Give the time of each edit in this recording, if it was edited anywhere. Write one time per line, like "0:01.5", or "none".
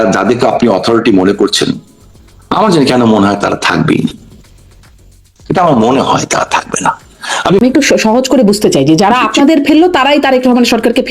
0:07.6